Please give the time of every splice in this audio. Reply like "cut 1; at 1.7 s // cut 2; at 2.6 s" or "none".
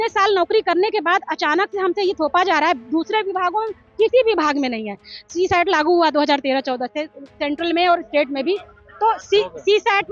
none